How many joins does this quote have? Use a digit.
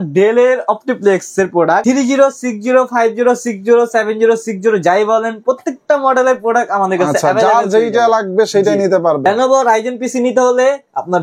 2